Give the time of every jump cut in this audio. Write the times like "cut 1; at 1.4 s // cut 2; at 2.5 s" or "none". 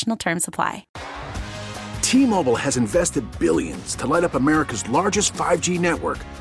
cut 1; at 0.9 s